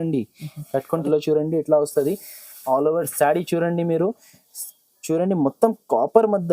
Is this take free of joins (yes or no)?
no